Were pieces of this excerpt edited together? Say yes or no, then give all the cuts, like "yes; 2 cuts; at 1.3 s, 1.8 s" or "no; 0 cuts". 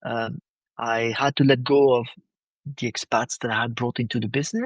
no; 0 cuts